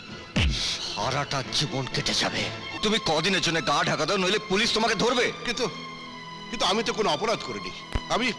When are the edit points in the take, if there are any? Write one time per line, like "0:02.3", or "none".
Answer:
0:02.7